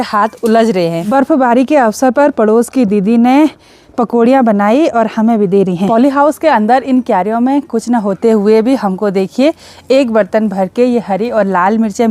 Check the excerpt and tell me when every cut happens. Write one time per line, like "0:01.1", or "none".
0:01.1
0:05.9